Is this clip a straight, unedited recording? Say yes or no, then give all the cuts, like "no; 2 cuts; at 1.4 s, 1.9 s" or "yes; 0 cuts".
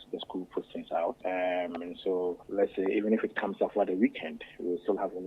no; 2 cuts; at 1.2 s, 2.4 s